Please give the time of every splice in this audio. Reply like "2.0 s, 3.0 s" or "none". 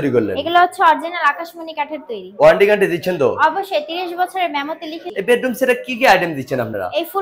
5.0 s